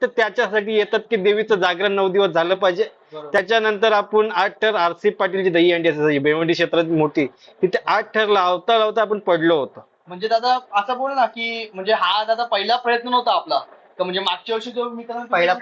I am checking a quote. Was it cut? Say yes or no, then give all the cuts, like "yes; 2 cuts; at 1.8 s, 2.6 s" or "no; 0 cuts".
yes; 1 cut; at 3.4 s